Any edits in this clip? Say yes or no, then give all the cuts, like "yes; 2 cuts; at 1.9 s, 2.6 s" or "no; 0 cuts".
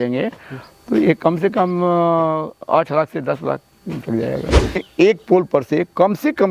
yes; 1 cut; at 4.8 s